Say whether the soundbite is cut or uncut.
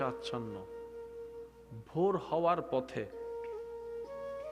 cut